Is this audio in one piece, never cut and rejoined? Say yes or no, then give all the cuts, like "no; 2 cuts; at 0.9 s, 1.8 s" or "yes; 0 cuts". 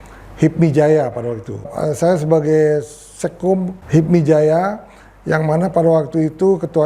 no; 2 cuts; at 1.7 s, 3.8 s